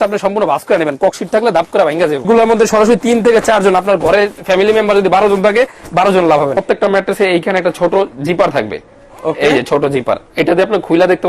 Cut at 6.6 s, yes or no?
yes